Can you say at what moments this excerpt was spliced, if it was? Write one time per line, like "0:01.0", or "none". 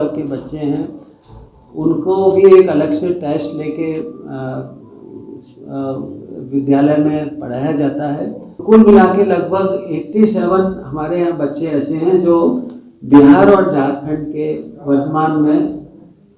0:08.5